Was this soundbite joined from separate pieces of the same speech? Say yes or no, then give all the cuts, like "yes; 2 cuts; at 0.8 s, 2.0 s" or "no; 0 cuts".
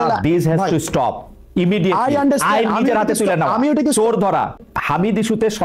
yes; 1 cut; at 4.6 s